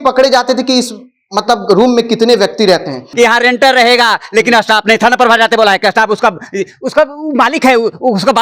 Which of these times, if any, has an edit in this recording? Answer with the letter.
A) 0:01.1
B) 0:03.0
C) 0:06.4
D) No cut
B